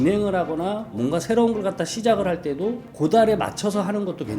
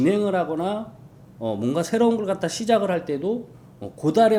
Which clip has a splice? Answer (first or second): first